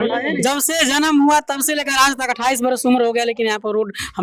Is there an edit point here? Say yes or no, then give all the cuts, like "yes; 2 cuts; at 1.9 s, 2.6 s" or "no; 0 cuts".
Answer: no; 0 cuts